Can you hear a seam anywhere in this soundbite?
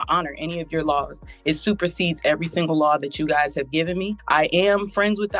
yes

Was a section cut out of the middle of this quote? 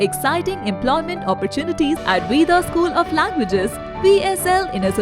yes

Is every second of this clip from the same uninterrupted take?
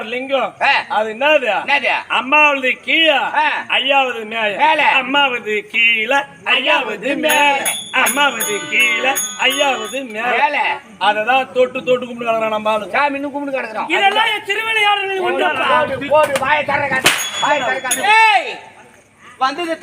no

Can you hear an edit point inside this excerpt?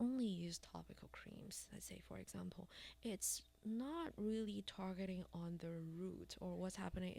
no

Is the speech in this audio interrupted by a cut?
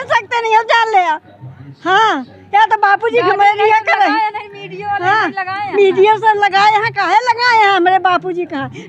no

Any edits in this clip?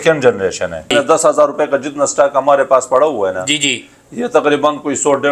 yes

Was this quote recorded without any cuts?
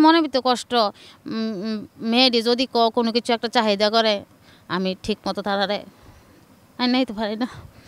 yes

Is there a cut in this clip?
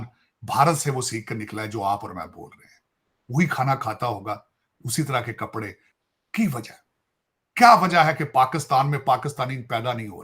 yes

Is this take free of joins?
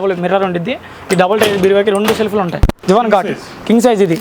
no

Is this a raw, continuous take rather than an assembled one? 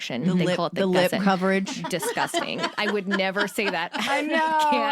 yes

